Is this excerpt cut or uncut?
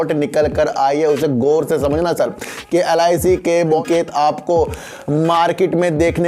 cut